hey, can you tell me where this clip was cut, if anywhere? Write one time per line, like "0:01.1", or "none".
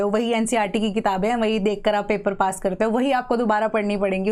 none

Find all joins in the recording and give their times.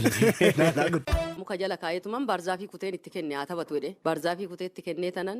0:01.2

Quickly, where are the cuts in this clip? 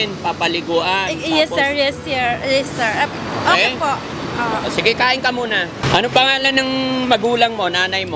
0:05.8

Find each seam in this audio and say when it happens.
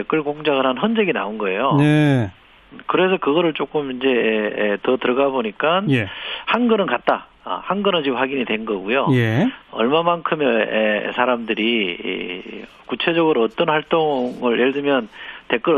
0:07.3

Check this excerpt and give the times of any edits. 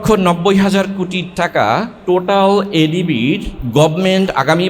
0:01.9
0:03.5

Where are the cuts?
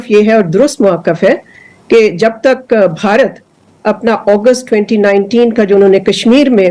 none

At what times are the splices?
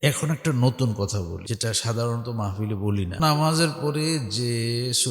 0:01.4
0:03.2

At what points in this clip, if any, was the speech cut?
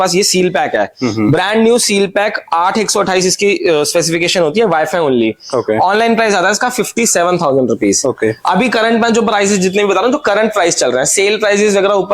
none

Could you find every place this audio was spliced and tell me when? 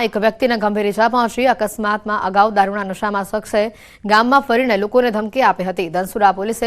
0:03.9

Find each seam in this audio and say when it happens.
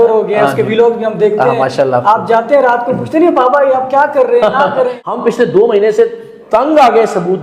0:05.1

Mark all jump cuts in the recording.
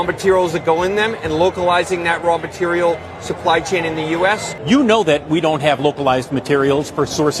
0:04.5

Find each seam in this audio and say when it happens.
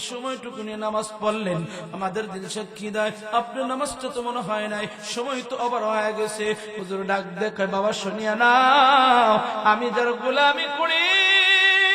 none

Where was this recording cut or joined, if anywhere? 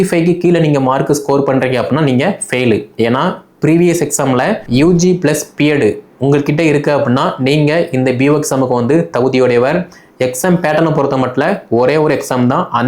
0:04.6

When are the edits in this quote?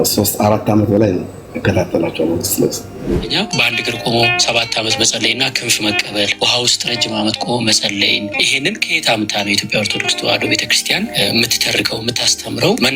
0:03.2

